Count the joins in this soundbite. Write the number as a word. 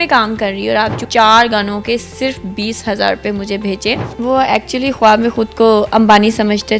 two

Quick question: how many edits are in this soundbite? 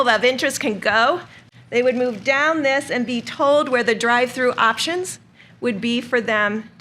one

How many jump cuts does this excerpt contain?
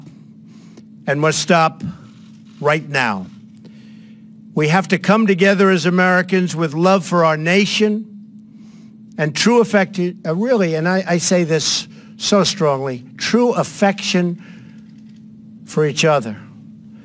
one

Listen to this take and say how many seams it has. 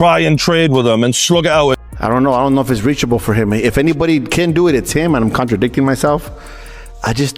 one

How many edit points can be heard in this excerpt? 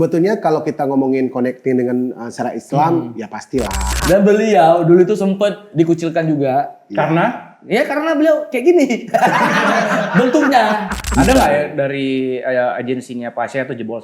two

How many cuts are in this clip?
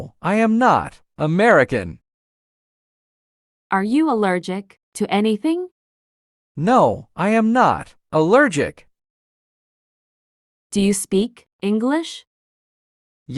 one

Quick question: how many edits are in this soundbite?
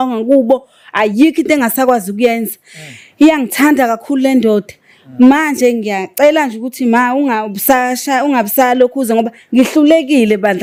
zero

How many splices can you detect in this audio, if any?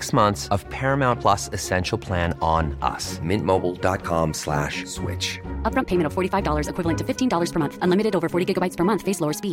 zero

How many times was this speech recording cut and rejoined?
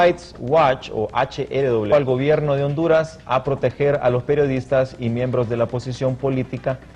zero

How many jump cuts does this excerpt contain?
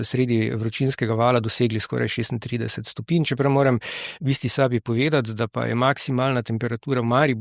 zero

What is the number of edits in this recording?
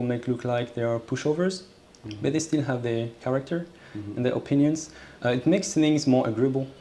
zero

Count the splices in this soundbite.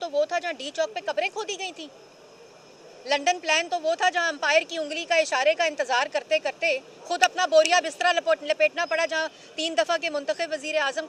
zero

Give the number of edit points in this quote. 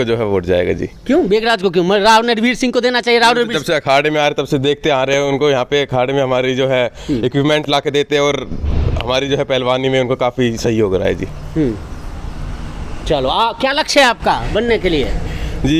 zero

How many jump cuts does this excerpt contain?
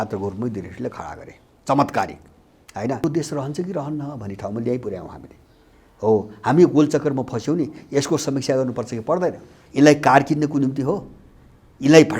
two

